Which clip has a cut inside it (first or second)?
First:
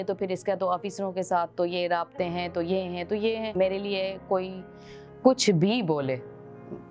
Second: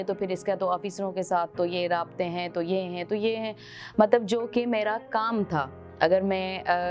first